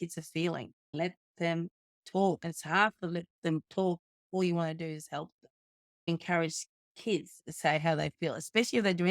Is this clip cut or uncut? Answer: cut